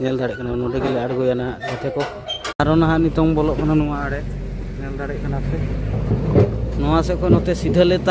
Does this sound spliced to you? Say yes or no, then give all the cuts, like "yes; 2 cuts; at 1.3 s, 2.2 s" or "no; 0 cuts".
yes; 1 cut; at 2.5 s